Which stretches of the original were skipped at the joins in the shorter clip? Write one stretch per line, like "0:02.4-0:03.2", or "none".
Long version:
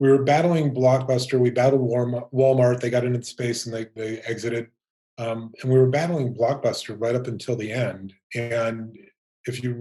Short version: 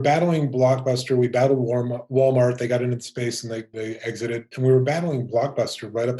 0:04.7-0:05.6